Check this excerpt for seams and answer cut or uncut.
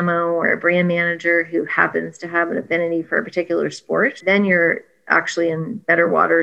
cut